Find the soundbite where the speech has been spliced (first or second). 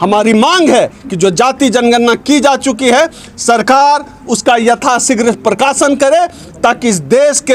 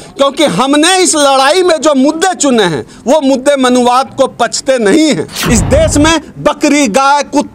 second